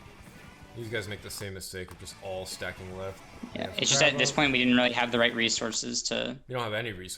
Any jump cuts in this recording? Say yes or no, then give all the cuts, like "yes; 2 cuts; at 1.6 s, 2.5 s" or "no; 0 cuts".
yes; 1 cut; at 3.3 s